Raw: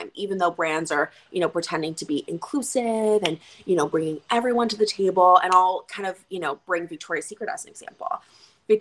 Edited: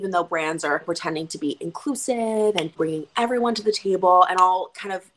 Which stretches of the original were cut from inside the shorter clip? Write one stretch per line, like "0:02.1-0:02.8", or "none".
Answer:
0:01.1-0:01.5
0:03.4-0:03.9